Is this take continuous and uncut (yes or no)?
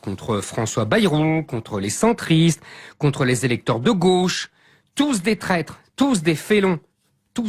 no